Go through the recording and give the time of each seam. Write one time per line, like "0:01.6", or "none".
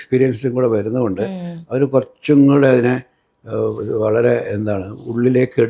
none